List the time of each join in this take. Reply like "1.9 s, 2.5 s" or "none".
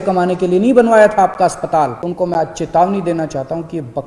2.0 s